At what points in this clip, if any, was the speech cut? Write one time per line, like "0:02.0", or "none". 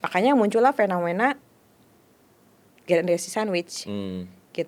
none